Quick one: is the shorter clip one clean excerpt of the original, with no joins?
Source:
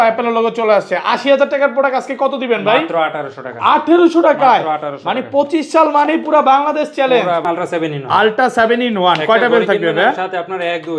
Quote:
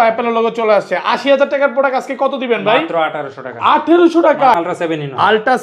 no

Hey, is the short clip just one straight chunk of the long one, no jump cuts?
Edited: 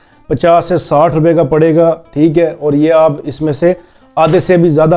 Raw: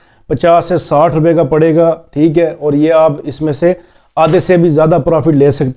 yes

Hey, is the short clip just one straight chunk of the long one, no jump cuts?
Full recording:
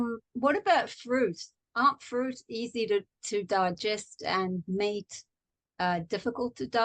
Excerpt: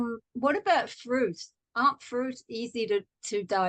yes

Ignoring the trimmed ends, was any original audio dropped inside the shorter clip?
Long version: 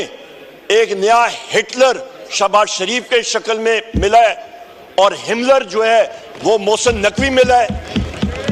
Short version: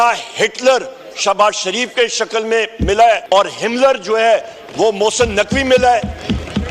yes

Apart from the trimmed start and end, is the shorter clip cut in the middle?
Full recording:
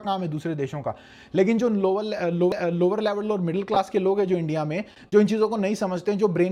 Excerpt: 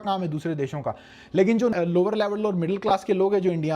yes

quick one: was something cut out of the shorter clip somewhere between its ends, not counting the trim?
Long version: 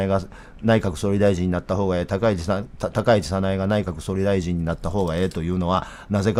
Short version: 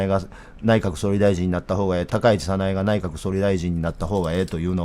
yes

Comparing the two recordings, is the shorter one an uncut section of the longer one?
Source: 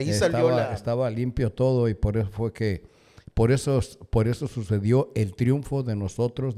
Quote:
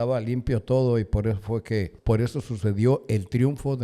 no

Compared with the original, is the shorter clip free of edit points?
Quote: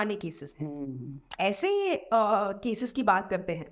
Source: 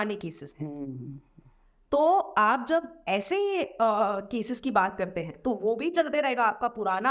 no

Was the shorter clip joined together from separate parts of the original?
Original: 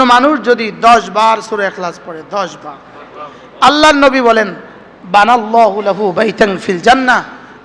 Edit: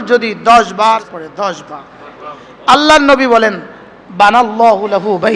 yes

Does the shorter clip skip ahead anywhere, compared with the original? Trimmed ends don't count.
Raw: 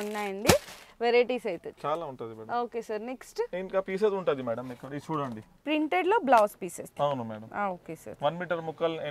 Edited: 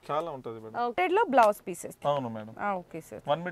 yes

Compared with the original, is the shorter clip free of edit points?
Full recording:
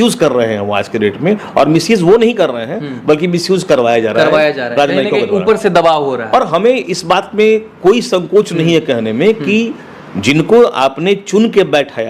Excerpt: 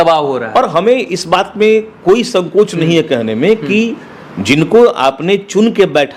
yes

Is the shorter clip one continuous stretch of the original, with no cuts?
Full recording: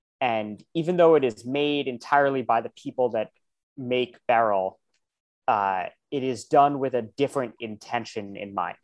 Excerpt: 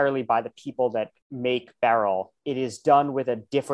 no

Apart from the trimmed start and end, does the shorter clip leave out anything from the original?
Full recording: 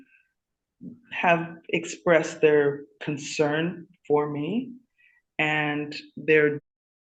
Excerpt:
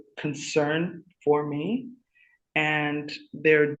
no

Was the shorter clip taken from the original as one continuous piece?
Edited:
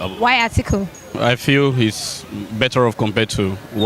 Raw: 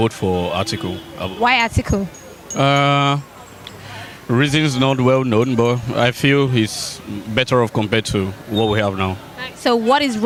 no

